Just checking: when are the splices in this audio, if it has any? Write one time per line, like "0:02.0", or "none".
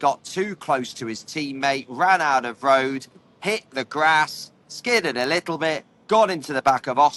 none